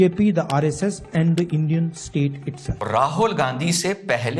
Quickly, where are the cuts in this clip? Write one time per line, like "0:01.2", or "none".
0:02.8